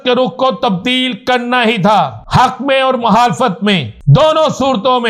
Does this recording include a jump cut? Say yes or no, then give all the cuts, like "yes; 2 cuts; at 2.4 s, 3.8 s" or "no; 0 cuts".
yes; 2 cuts; at 2.2 s, 3.9 s